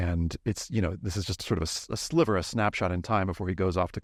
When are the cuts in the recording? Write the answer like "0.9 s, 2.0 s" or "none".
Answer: none